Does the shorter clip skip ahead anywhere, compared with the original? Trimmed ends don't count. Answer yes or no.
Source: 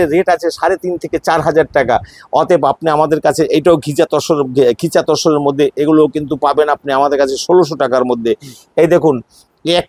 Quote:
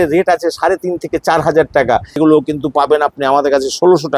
yes